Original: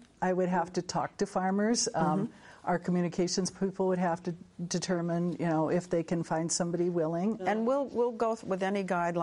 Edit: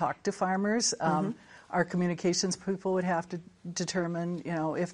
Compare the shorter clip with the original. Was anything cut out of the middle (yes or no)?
no